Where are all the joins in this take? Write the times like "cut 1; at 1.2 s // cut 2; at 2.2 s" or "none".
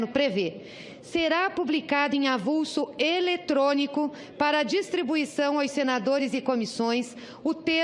none